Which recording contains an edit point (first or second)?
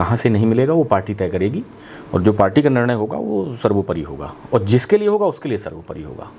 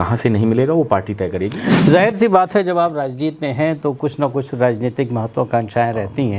second